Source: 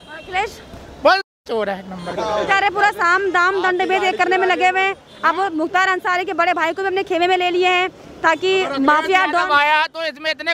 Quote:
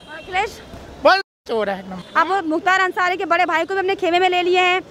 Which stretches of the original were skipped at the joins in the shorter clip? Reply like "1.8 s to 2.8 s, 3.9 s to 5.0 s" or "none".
2.0 s to 5.1 s